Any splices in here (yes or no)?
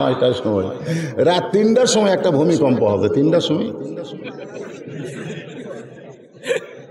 no